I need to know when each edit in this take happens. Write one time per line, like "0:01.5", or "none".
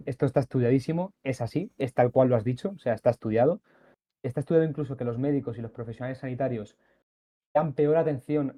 none

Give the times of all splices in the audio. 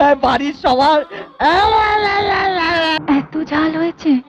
0:02.9

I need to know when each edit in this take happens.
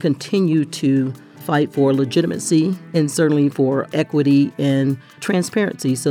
0:02.8

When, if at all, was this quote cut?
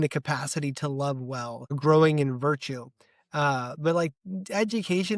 0:01.8

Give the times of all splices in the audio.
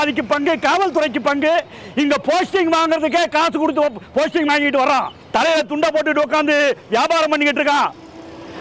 0:05.2

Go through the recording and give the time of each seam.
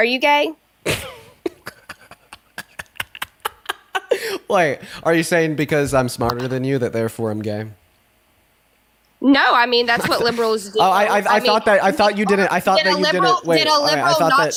none

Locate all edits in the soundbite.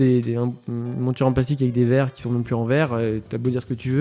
none

